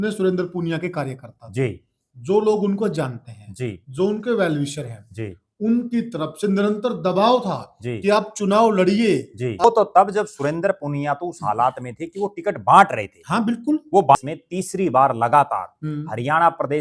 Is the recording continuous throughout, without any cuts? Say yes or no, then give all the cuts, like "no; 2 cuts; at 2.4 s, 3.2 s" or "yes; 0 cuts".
no; 2 cuts; at 9.6 s, 14.2 s